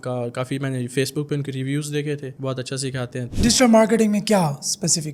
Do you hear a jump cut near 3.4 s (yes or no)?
yes